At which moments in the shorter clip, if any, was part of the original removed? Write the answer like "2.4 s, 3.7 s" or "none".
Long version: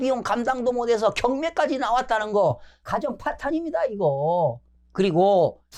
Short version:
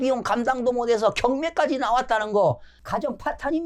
none